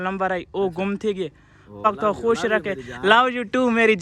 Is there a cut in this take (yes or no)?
yes